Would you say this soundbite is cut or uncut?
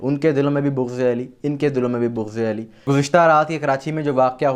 cut